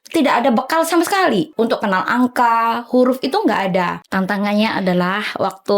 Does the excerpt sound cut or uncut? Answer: cut